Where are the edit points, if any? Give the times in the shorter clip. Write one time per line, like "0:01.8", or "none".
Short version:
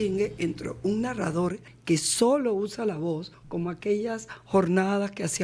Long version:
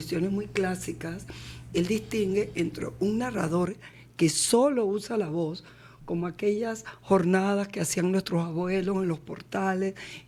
0:01.7
0:03.4